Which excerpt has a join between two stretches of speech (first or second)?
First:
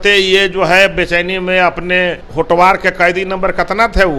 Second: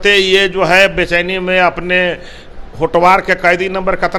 first